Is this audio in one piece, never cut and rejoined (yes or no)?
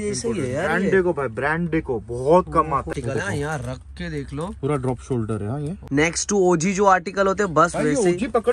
no